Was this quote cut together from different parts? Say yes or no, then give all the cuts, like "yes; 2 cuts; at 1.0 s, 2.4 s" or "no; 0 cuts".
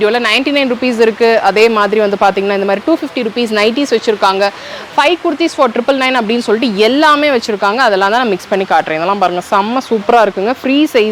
no; 0 cuts